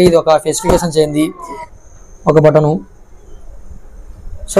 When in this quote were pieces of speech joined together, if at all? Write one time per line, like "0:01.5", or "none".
0:01.7